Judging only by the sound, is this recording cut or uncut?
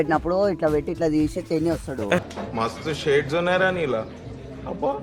uncut